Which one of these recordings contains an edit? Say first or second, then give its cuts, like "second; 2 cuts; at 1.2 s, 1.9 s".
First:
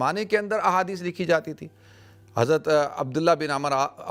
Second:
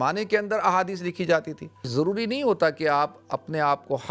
second; 1 cut; at 1.9 s